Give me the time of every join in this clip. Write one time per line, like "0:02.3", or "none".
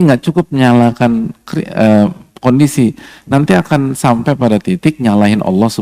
none